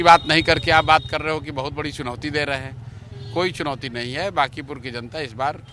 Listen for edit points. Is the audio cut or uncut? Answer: uncut